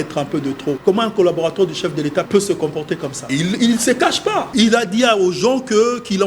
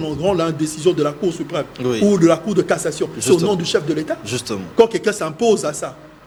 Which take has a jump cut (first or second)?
first